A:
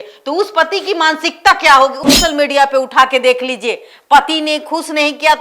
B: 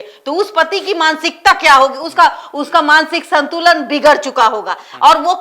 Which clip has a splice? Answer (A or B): A